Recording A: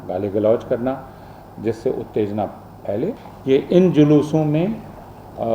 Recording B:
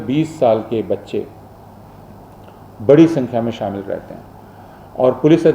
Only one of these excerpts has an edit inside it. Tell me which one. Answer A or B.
A